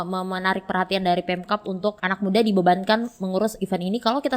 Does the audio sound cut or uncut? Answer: cut